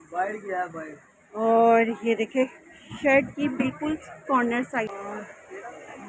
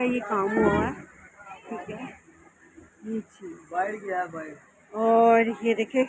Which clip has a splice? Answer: first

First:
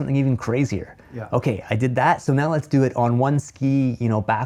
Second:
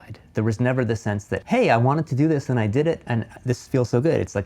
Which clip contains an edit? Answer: second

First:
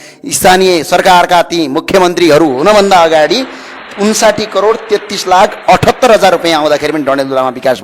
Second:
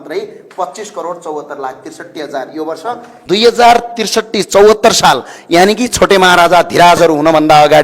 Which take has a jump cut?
second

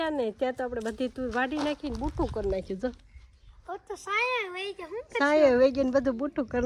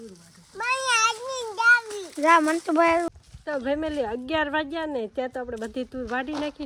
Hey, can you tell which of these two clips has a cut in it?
second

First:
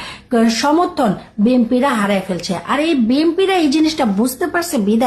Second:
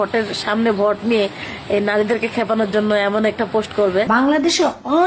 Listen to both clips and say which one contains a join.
second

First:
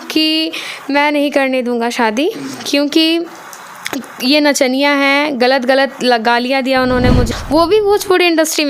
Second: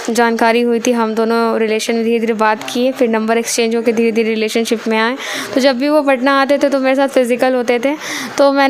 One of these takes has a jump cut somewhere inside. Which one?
first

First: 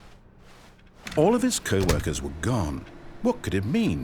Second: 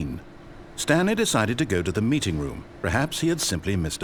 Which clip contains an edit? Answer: first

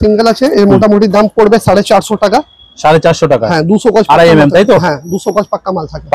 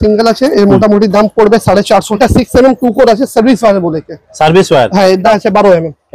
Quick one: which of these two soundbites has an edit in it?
second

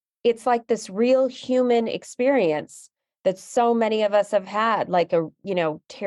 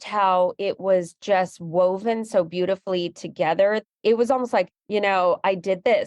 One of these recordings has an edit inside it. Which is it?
second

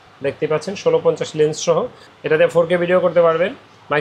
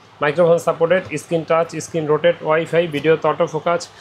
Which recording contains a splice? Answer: first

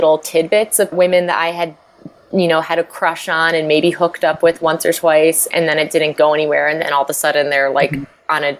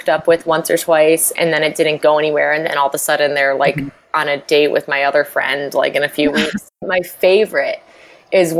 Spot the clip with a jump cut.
second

